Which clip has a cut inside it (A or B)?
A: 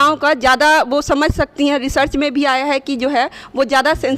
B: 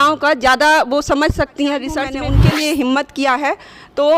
B